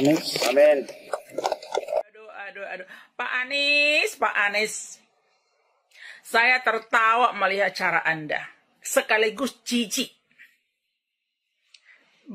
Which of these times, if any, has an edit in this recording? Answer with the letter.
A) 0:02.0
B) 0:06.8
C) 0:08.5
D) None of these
A